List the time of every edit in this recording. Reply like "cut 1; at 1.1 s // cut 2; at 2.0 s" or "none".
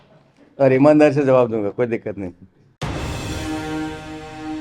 cut 1; at 2.8 s